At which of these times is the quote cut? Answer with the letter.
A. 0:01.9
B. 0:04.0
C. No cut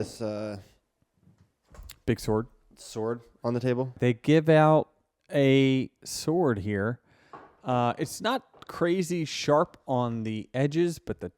B